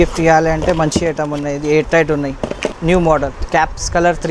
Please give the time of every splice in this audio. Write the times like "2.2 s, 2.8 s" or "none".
2.8 s, 3.4 s

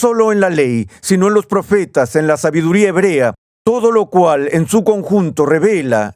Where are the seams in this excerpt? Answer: 3.5 s

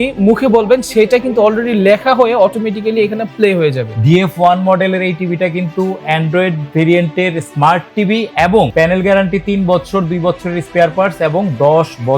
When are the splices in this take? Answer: 3.9 s, 8.7 s

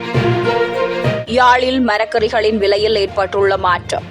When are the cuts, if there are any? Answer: 1.2 s

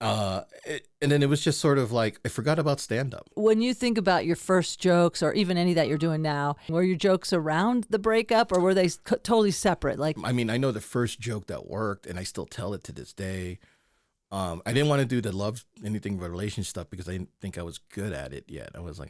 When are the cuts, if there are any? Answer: 3.3 s, 6.7 s, 10.2 s

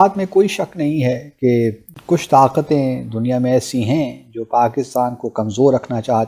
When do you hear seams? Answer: none

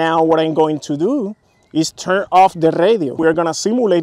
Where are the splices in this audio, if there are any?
3.1 s

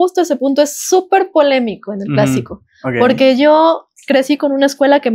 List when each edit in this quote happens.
none

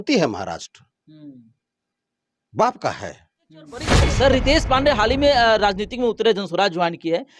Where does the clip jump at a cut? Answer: 4.0 s

